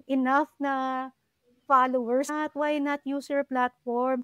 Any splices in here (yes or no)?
yes